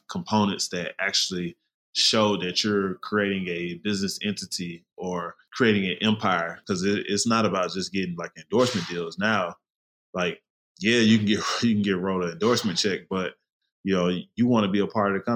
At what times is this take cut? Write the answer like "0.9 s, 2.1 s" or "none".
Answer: 5.4 s, 6.6 s